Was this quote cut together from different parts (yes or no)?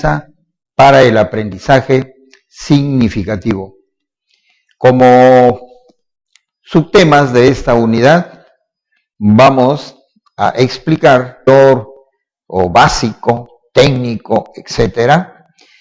no